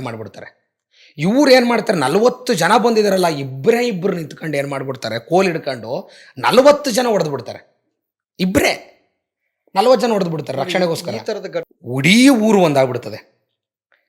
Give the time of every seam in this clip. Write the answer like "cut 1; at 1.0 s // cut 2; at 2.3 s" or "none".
cut 1; at 11.7 s